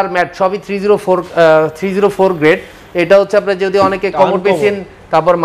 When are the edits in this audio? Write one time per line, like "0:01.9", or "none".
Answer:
none